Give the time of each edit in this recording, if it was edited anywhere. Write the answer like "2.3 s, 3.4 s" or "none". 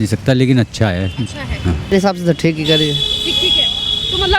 1.9 s

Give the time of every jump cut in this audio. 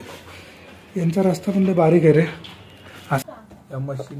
3.2 s

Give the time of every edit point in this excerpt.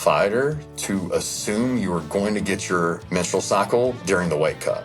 3.0 s, 4.0 s

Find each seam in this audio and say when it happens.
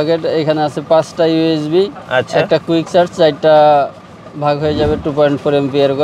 none

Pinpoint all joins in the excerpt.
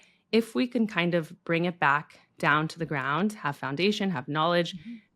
none

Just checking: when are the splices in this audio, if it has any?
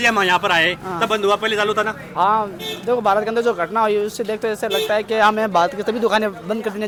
none

